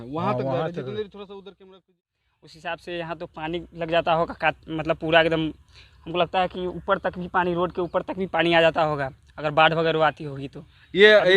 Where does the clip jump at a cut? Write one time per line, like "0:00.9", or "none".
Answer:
0:01.9